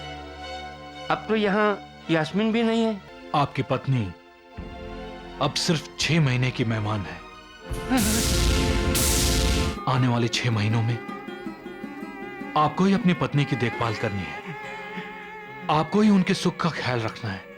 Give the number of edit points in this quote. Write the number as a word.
two